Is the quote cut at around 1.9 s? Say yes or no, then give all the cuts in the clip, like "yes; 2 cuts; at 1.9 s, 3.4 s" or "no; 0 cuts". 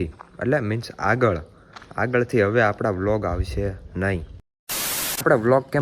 no; 1 cut; at 4.5 s